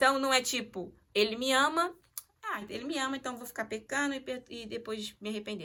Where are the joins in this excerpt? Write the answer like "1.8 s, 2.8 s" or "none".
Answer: none